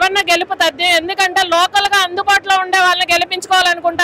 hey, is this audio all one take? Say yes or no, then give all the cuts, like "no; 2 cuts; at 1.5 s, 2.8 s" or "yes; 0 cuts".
yes; 0 cuts